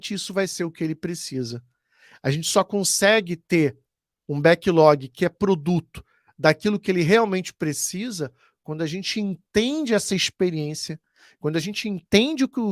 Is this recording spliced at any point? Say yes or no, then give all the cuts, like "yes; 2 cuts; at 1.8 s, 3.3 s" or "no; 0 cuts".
no; 0 cuts